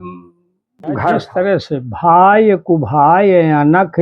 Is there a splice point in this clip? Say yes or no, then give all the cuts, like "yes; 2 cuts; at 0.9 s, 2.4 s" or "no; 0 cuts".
yes; 1 cut; at 1.3 s